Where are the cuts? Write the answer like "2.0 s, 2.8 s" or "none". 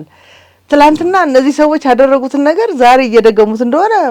none